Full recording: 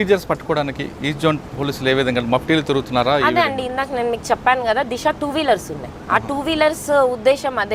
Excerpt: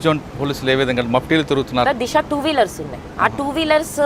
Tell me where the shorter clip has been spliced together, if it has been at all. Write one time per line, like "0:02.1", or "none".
0:01.9